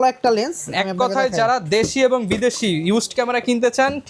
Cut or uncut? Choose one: uncut